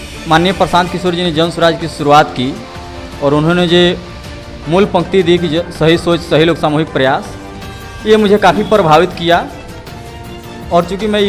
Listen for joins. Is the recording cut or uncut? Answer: uncut